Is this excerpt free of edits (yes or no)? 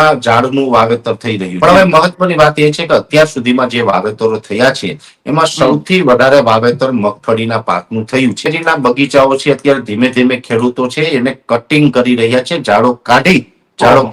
no